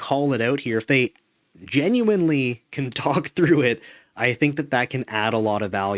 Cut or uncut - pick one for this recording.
uncut